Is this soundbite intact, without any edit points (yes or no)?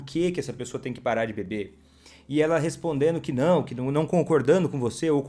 yes